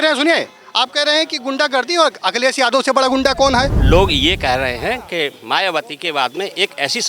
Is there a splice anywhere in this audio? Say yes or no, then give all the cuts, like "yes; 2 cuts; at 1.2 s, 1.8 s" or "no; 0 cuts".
yes; 1 cut; at 3.8 s